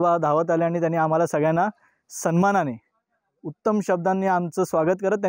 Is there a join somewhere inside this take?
no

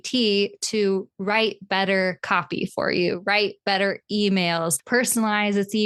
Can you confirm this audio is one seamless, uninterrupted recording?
yes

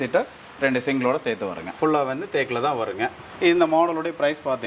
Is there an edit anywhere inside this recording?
yes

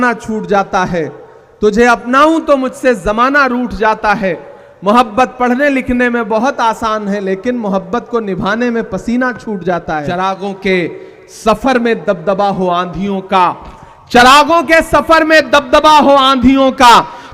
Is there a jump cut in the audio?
yes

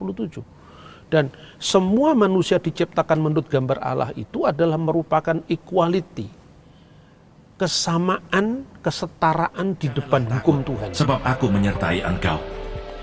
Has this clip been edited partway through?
yes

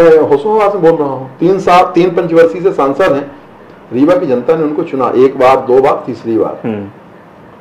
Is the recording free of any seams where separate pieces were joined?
yes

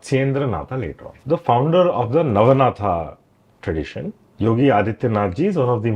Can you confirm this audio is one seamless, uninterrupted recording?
no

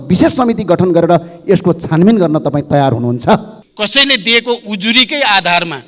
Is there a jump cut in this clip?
yes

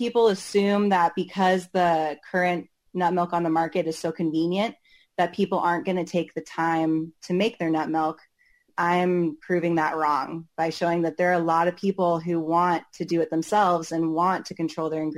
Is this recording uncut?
yes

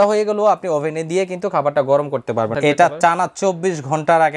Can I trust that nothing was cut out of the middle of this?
no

